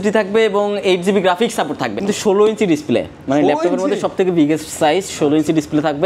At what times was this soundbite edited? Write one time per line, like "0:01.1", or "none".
0:02.0